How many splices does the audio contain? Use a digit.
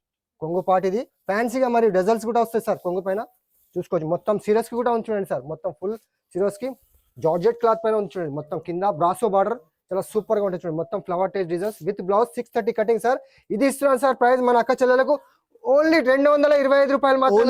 0